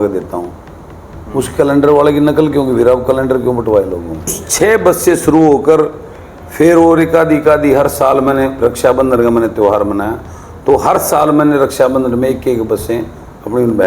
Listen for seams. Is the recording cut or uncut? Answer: cut